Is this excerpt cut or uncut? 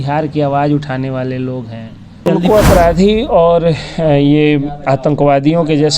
cut